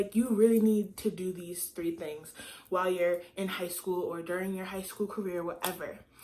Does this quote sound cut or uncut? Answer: uncut